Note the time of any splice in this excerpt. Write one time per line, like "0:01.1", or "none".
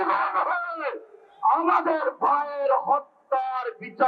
none